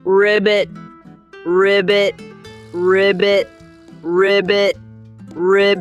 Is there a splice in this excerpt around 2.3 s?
no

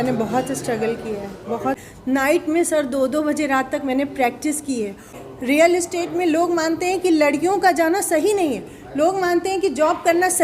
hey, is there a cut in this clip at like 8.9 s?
no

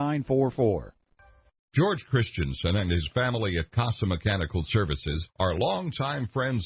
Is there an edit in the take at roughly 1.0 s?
yes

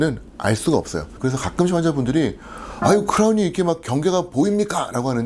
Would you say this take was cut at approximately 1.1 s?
yes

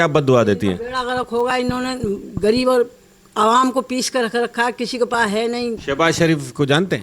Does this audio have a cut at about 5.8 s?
yes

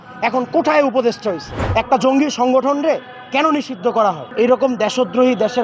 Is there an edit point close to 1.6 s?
yes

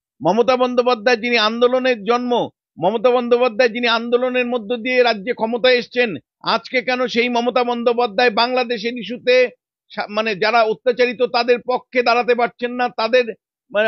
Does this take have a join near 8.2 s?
no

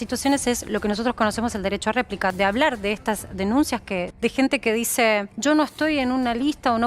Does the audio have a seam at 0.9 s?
no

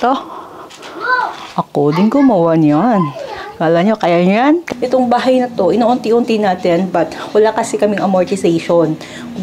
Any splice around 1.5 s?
no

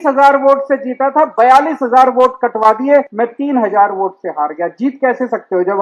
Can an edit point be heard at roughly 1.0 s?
no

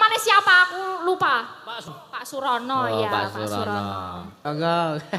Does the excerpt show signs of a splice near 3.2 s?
no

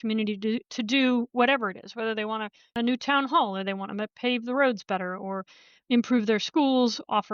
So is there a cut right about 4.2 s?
no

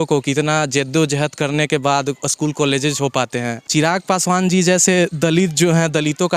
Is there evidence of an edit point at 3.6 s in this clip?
yes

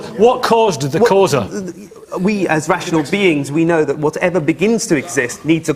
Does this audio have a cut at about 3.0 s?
no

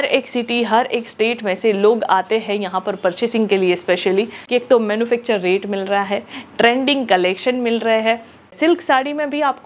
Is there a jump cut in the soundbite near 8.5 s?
yes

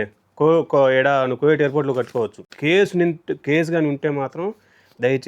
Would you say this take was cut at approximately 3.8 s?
no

